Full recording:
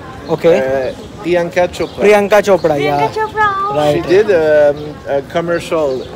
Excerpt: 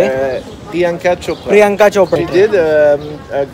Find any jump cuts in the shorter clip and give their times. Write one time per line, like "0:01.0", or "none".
0:02.2